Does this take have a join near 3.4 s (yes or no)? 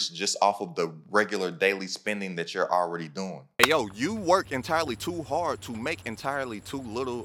yes